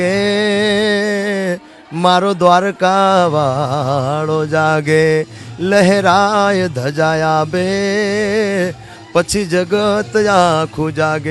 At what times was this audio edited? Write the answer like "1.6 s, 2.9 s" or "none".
none